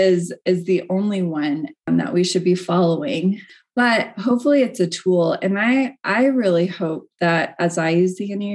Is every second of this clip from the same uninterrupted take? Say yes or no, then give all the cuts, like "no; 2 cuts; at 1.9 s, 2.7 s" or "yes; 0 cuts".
no; 1 cut; at 1.9 s